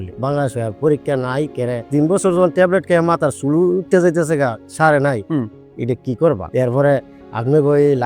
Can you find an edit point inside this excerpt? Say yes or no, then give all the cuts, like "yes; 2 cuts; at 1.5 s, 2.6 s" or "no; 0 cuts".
no; 0 cuts